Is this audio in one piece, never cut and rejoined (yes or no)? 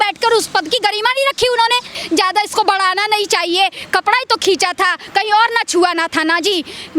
no